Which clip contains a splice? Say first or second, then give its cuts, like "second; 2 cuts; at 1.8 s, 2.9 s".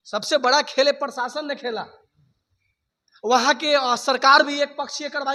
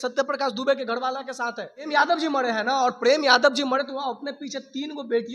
second; 1 cut; at 1.9 s